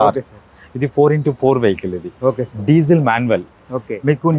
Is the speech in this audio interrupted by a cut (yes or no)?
no